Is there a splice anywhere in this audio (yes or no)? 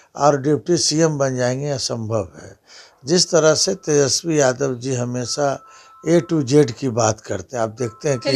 no